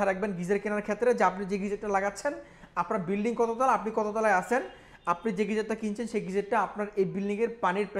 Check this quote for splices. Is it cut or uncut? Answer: uncut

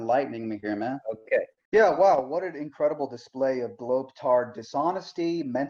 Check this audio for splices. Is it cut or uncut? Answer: cut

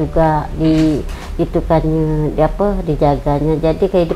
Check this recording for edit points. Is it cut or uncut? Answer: uncut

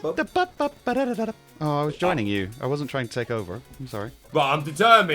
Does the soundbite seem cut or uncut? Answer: cut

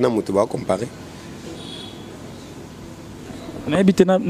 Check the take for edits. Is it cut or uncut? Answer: uncut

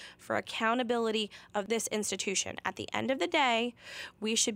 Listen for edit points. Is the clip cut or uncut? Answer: cut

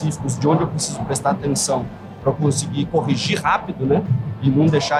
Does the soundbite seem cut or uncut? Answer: uncut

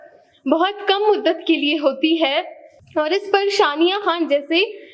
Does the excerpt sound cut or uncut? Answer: uncut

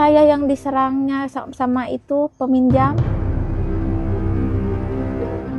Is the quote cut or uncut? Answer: uncut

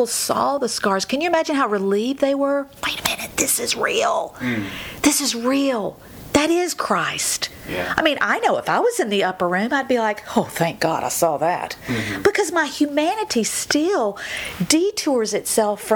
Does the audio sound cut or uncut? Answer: uncut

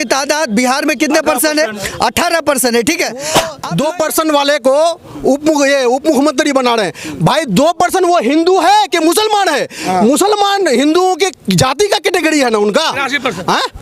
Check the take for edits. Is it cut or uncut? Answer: cut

